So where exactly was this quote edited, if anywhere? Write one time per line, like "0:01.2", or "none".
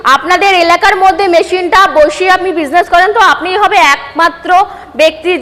none